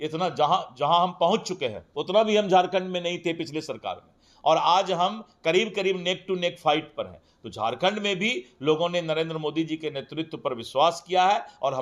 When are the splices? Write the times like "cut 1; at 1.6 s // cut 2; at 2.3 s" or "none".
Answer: none